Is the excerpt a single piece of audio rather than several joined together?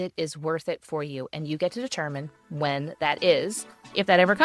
yes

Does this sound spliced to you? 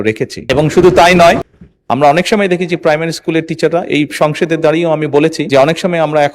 yes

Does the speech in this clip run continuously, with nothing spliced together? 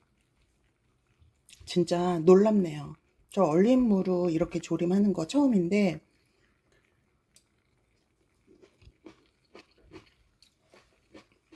yes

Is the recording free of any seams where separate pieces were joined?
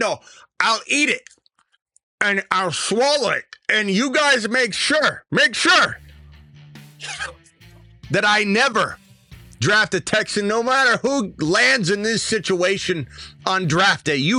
yes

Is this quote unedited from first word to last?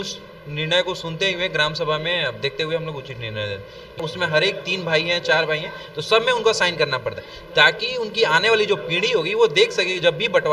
no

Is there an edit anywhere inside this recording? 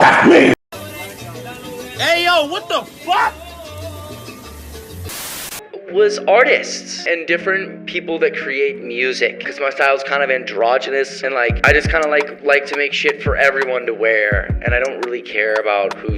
no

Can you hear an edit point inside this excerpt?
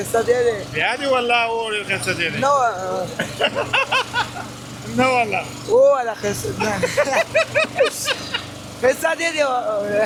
no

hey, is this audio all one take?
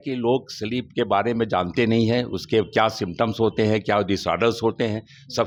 yes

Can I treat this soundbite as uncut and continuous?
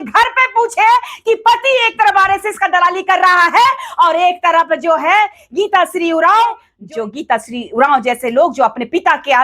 no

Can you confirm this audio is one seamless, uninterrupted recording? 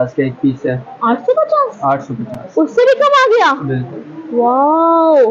yes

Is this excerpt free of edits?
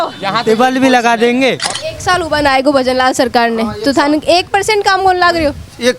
no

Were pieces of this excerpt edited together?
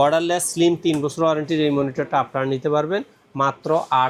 no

